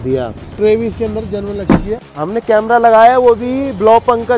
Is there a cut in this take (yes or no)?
yes